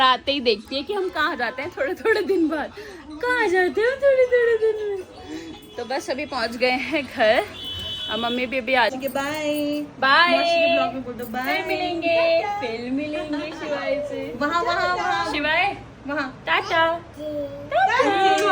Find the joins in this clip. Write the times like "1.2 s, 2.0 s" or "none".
9.0 s